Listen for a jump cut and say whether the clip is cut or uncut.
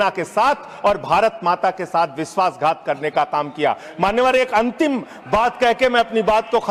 uncut